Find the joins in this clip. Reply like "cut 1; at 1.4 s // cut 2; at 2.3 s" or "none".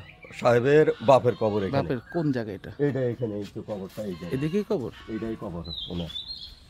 none